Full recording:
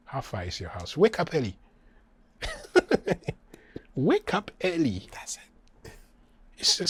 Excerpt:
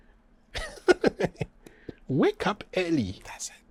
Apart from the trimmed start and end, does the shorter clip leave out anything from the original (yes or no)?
no